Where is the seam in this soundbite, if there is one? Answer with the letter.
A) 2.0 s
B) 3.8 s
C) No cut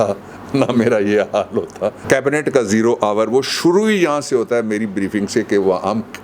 A